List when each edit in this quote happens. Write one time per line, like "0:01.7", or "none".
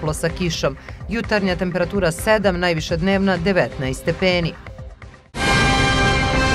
0:05.4